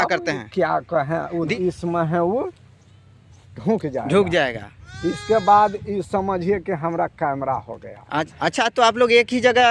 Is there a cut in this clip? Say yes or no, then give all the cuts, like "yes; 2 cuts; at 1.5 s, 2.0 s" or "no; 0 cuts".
yes; 2 cuts; at 1.5 s, 8.3 s